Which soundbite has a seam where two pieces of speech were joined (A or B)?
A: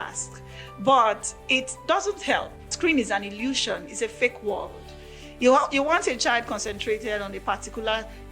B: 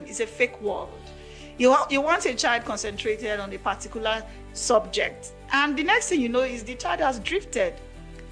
A